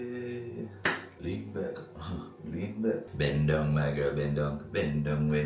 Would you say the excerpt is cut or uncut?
cut